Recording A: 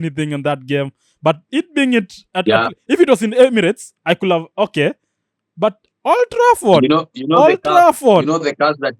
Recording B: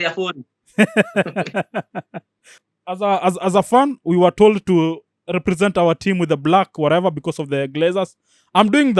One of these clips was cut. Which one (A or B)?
B